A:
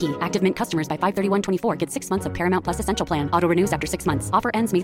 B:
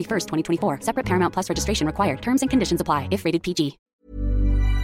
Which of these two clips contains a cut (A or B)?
B